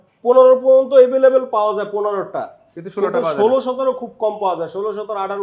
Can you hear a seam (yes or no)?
no